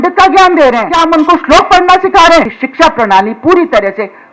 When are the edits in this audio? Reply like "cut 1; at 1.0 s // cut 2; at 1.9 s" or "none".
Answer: cut 1; at 0.9 s // cut 2; at 2.6 s